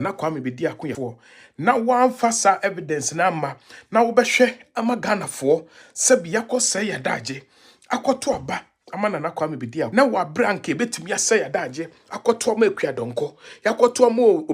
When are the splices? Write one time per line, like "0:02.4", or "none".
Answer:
0:01.0
0:09.9